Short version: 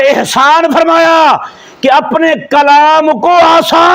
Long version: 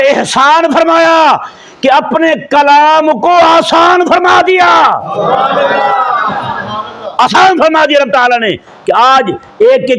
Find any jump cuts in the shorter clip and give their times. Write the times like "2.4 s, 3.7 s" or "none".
none